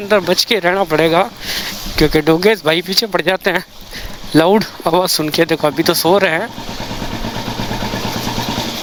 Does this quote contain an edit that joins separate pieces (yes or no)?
no